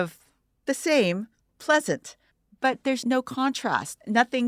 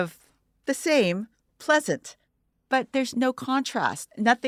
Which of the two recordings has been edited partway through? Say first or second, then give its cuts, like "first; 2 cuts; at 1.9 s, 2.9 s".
first; 1 cut; at 2.8 s